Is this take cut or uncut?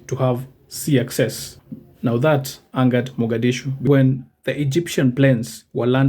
cut